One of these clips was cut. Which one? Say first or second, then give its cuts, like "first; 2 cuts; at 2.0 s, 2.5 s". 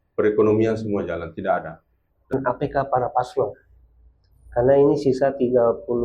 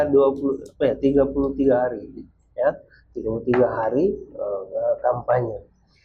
first; 1 cut; at 2.3 s